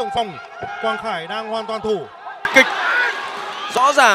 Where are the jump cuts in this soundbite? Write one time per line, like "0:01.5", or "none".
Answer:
0:02.5